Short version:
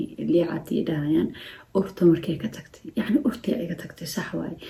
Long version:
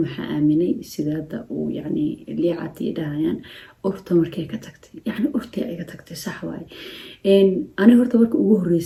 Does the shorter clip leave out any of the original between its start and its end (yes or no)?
no